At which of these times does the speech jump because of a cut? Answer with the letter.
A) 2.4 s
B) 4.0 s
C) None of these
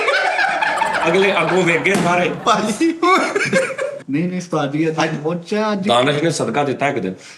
B